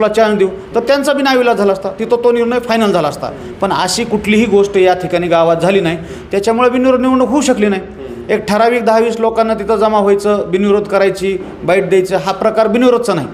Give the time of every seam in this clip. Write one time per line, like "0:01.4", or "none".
none